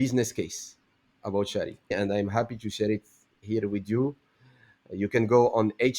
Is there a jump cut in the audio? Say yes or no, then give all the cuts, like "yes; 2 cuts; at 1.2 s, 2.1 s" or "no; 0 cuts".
yes; 1 cut; at 1.9 s